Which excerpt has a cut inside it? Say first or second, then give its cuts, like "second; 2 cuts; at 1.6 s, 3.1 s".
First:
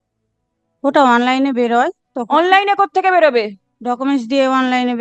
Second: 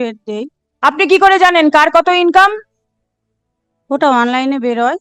first; 1 cut; at 3.7 s